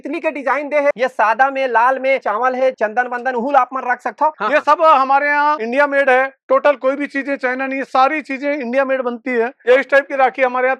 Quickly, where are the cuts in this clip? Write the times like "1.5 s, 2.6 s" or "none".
0.9 s, 4.4 s, 9.6 s